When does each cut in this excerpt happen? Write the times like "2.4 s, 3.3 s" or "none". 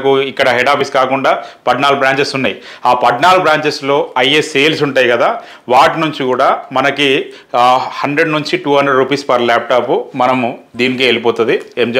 none